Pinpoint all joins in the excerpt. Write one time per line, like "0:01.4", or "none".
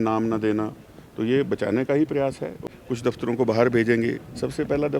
0:02.6